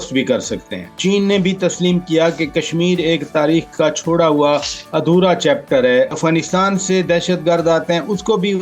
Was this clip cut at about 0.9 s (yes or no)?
yes